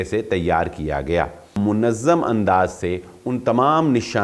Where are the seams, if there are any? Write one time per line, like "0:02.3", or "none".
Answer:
0:01.6